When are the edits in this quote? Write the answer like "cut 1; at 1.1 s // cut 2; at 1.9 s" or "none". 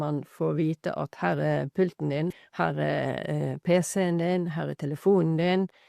cut 1; at 2.4 s

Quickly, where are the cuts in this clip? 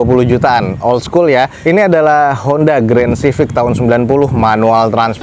none

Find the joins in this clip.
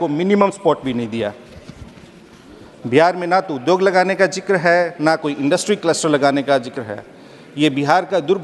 none

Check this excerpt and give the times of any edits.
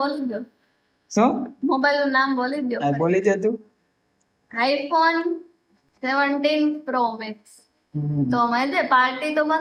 none

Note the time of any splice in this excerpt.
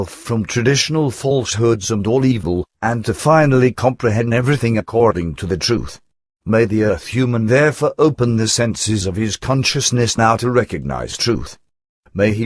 none

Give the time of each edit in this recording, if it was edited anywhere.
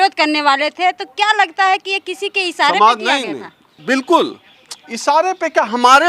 cut 1; at 3.8 s

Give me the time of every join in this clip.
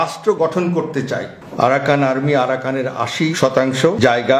cut 1; at 1.4 s // cut 2; at 3.3 s

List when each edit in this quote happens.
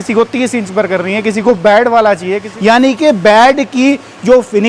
cut 1; at 2.4 s

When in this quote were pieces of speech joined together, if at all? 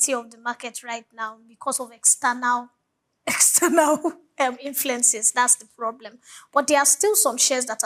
none

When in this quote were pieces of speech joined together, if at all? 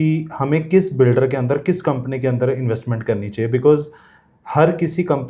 none

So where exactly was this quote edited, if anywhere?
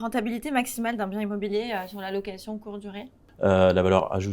cut 1; at 3.2 s

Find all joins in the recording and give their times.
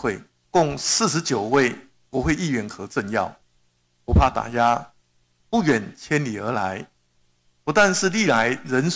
none

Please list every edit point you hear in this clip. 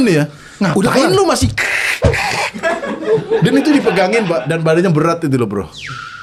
none

